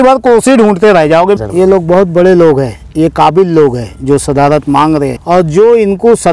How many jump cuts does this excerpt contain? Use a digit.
2